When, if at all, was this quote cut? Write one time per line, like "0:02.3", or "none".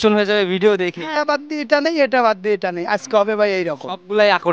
0:01.2